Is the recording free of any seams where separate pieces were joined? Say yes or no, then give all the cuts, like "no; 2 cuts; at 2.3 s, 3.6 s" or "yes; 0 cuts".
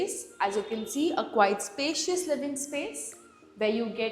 yes; 0 cuts